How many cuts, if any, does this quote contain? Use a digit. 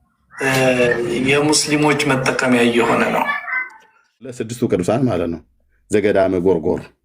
1